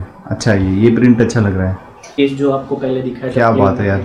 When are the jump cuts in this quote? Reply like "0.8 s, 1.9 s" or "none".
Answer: 2.2 s